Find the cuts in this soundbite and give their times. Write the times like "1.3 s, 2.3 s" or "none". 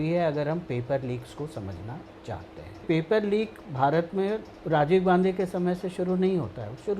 2.8 s, 4.5 s